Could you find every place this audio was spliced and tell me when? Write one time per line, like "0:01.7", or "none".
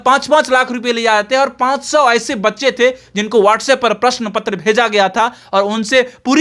none